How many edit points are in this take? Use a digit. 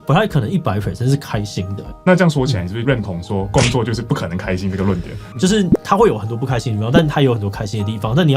3